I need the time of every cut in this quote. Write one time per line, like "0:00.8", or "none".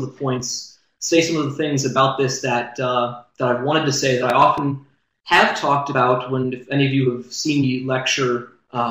0:05.5